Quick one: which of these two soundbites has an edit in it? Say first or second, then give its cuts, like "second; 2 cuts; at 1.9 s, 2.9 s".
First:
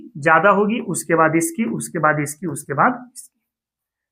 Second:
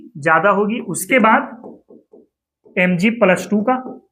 second; 1 cut; at 1.0 s